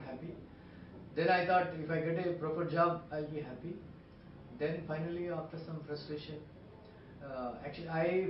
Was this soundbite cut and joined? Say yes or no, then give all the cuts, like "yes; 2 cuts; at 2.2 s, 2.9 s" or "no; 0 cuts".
no; 0 cuts